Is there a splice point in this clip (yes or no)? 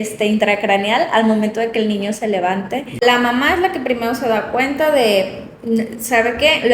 yes